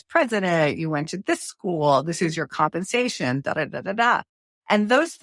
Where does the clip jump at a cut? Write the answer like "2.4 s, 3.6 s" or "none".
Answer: none